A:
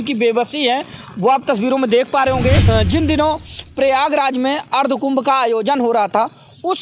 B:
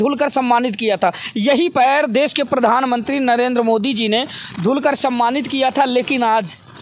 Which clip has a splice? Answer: A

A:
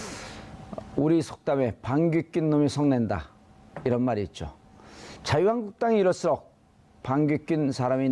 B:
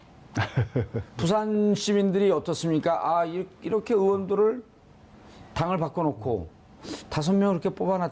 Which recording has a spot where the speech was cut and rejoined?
B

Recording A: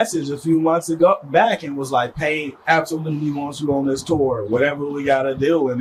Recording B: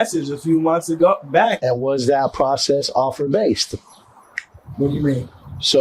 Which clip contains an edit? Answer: B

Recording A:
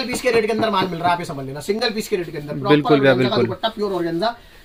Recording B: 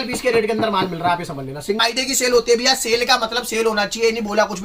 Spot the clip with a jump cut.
B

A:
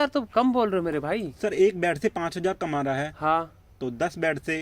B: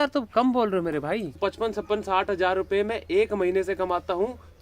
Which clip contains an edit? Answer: B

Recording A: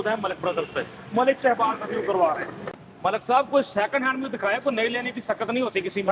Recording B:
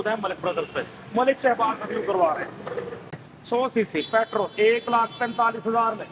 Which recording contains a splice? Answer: B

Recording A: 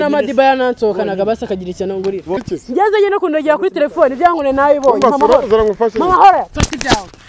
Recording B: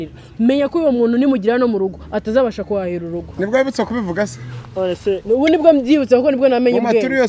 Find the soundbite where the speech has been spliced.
A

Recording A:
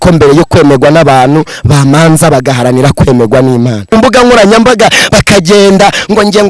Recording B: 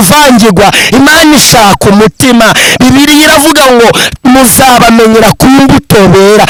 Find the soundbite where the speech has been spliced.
A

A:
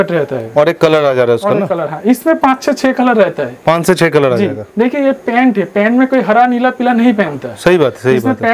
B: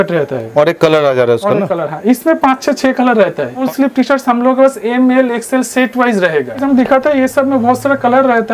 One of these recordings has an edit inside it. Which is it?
B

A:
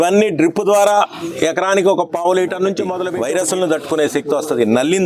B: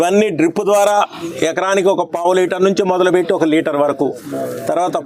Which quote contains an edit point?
A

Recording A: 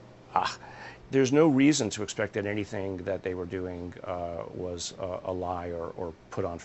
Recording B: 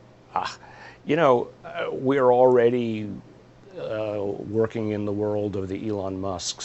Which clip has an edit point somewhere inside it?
A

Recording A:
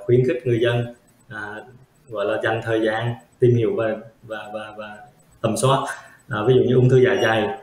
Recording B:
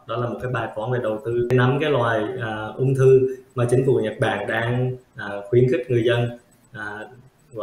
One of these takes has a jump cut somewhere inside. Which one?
B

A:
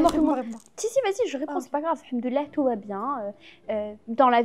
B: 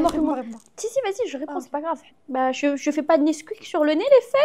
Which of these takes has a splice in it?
B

